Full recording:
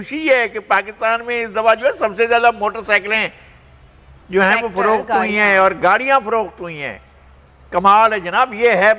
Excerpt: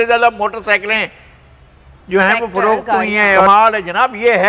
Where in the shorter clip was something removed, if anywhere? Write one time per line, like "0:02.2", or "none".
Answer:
0:03.5